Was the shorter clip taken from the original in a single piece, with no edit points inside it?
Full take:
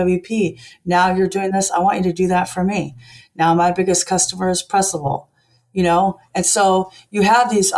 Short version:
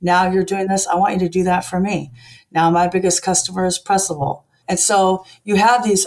no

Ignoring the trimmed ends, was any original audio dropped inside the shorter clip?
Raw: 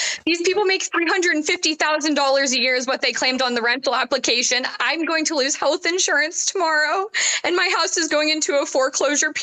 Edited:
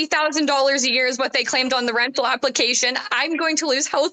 no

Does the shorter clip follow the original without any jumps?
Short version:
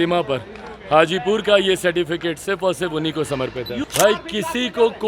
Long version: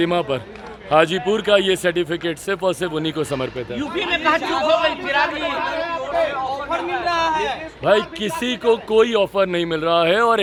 no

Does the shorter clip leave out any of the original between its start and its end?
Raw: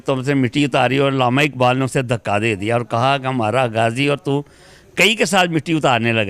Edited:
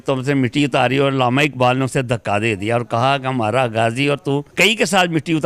yes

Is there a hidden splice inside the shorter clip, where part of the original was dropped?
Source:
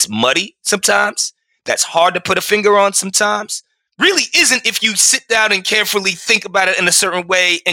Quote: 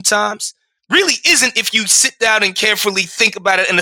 no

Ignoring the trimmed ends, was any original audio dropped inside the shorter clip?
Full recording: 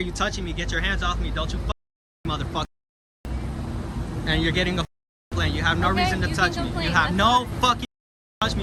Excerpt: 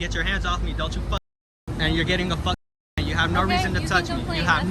yes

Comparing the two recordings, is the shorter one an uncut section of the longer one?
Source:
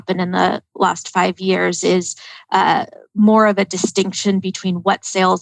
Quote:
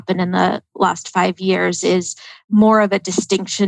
no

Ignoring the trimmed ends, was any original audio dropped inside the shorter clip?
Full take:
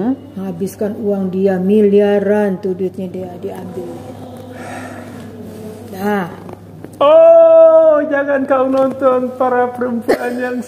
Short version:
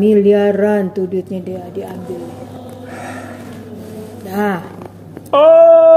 no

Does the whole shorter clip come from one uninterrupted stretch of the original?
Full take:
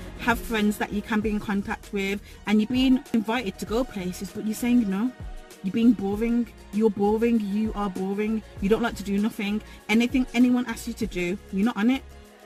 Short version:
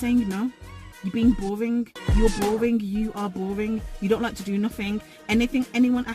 yes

